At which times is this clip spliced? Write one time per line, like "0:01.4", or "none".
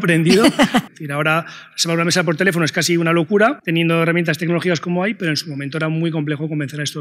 0:00.9
0:03.6

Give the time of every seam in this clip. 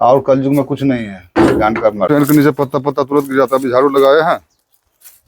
0:02.1

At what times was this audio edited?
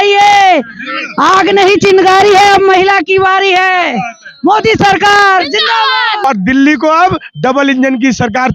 0:06.2

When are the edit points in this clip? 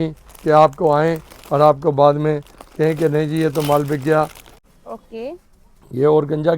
0:04.6

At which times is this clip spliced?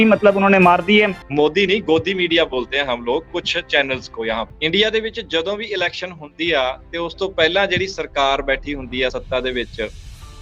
0:01.2
0:04.5

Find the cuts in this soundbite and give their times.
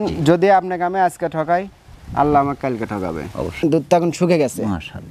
0:03.5

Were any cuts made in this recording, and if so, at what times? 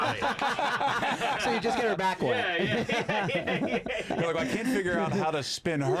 none

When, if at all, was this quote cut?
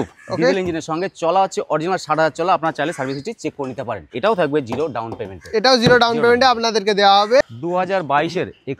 0:04.1
0:07.5

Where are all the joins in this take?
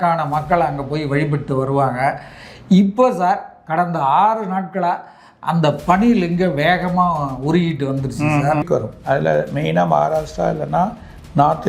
0:08.7

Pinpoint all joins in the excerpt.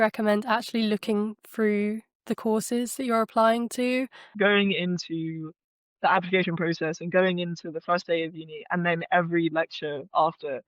0:04.3

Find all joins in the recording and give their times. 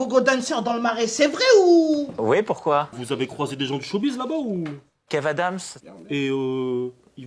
0:03.0

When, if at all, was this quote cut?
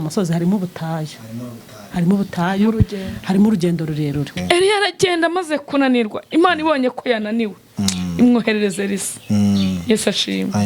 0:04.3

